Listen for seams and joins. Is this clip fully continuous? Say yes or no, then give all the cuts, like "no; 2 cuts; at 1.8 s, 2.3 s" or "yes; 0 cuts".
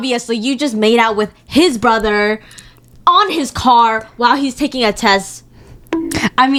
yes; 0 cuts